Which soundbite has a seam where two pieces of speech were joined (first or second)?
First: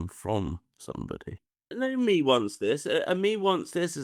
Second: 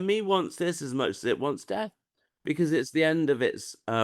first